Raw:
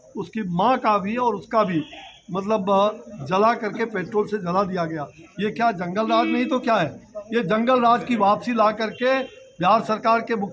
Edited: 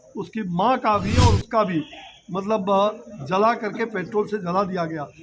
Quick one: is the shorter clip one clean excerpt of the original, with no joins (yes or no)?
yes